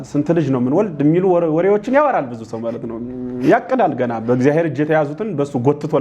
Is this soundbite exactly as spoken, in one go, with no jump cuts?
yes; 0 cuts

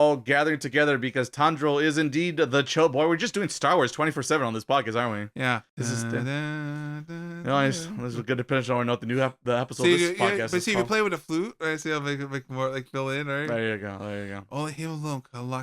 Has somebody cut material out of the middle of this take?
yes; 1 cut; at 5.7 s

